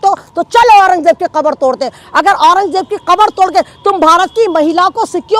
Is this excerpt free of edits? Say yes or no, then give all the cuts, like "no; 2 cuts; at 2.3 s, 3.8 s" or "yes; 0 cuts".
yes; 0 cuts